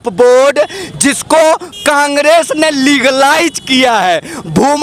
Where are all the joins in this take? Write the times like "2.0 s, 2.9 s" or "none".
none